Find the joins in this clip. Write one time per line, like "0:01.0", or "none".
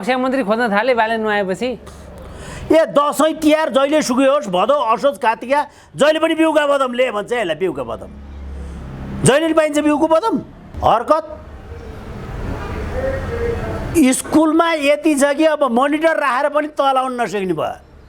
0:10.7